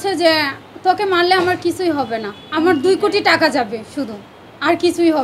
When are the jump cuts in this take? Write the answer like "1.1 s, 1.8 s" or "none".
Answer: 2.4 s